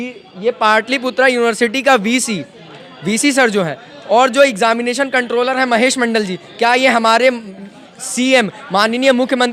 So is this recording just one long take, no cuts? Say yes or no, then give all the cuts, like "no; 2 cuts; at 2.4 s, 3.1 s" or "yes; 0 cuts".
yes; 0 cuts